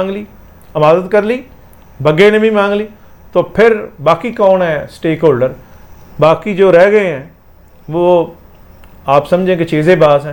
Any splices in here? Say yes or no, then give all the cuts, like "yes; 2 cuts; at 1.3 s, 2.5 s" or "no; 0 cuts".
no; 0 cuts